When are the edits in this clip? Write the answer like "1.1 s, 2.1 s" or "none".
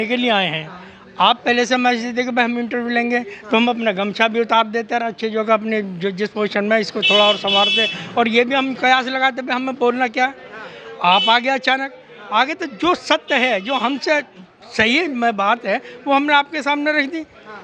none